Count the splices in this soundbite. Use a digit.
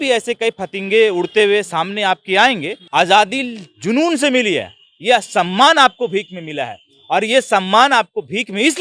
1